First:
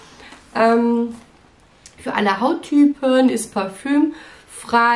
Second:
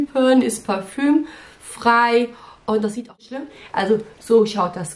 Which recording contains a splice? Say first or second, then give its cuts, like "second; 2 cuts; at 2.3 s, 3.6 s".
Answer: second; 1 cut; at 3.3 s